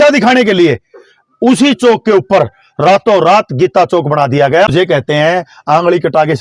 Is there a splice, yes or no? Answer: yes